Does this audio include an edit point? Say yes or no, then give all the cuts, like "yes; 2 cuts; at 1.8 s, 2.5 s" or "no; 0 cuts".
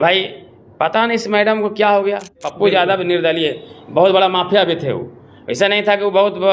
yes; 1 cut; at 2.5 s